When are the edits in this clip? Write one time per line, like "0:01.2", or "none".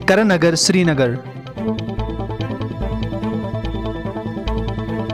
0:01.5